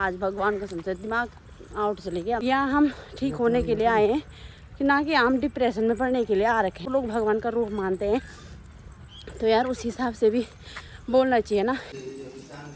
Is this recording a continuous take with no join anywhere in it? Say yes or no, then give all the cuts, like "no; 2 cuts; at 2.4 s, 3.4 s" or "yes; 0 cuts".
no; 3 cuts; at 2.4 s, 6.8 s, 11.9 s